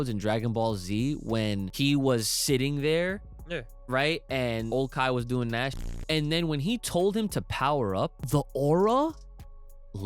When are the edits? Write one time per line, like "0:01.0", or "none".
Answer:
0:01.7
0:04.7
0:05.8
0:08.2